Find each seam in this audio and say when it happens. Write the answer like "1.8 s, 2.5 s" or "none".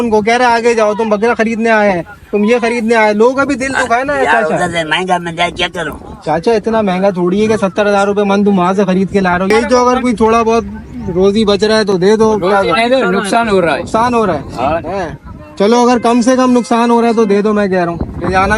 9.5 s